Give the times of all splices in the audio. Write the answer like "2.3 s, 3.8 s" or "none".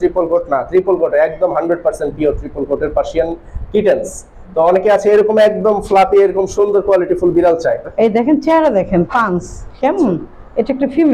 7.9 s